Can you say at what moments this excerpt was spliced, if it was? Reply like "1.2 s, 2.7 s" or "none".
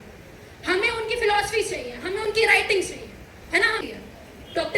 3.8 s